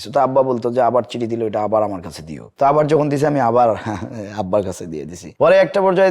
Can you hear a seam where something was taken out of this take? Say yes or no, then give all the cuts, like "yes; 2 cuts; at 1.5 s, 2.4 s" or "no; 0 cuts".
no; 0 cuts